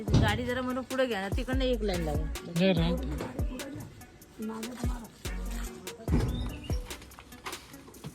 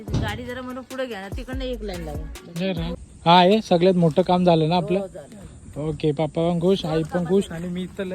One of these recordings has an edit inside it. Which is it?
second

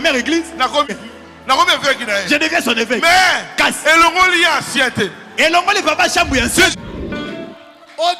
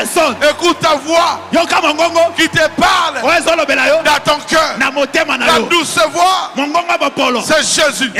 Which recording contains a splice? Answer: first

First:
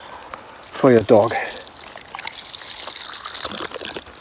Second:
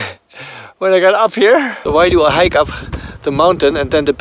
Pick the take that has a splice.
second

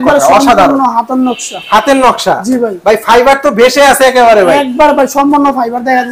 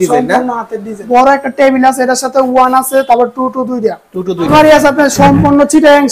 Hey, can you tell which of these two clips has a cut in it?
second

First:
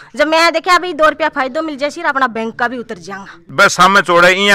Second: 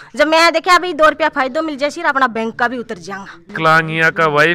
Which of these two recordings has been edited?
first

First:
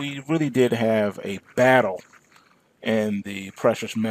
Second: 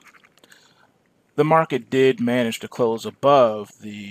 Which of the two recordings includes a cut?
second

